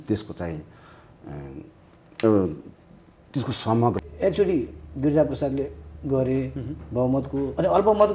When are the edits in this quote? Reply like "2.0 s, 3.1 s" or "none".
4.0 s